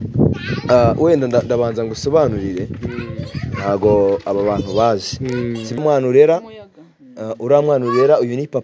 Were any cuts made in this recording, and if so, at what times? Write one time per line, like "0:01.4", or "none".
0:05.8